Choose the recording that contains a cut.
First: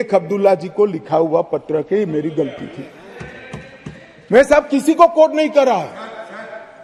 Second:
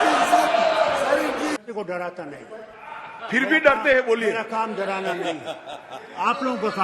second; 1 cut; at 1.6 s

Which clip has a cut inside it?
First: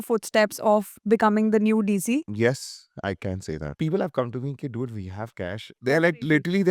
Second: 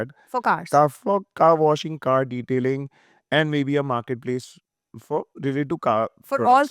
first; 3 cuts; at 2.3 s, 3.7 s, 5.8 s

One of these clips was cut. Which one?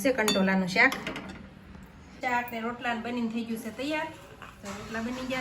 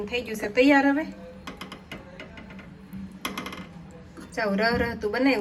first; 1 cut; at 2.2 s

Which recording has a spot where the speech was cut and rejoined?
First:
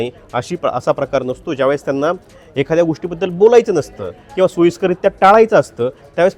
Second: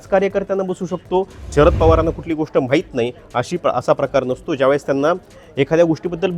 second; 1 cut; at 1.4 s

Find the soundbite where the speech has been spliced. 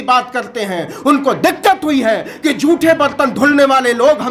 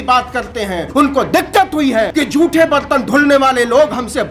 second; 2 cuts; at 0.8 s, 2.1 s

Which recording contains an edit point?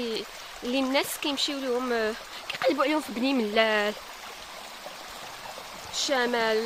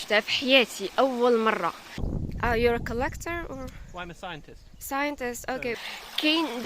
second; 2 cuts; at 2.0 s, 5.7 s

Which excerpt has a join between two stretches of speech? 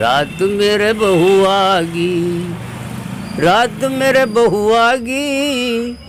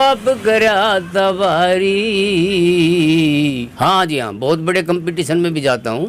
second; 1 cut; at 3.6 s

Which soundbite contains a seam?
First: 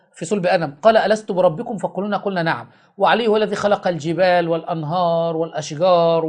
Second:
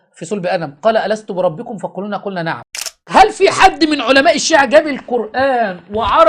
second; 1 cut; at 3.0 s

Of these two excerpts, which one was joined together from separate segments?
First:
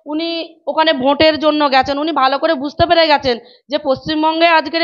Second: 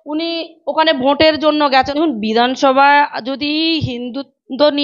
second; 1 cut; at 1.9 s

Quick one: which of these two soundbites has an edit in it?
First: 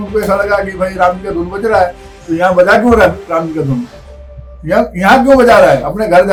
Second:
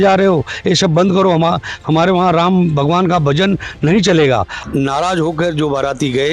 second; 1 cut; at 4.6 s

